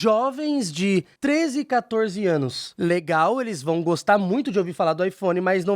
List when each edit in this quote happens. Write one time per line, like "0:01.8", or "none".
0:01.1